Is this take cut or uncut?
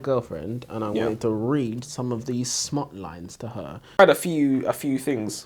cut